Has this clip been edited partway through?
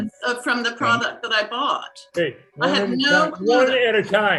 no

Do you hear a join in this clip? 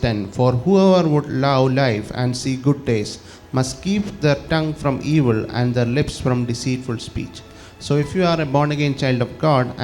no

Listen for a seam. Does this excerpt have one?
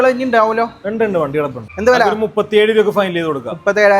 yes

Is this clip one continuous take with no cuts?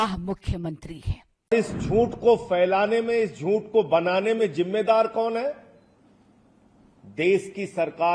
no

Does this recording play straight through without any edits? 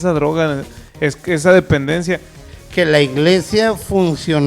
no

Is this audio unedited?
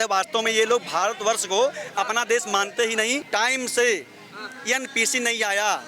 no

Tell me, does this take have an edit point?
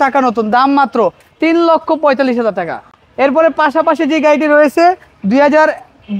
no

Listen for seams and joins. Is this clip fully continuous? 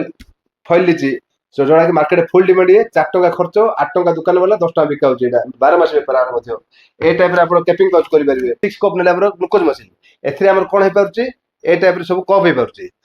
no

